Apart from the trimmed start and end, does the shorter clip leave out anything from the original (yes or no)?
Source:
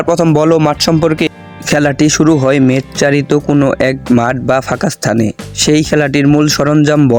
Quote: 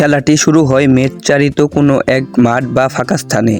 no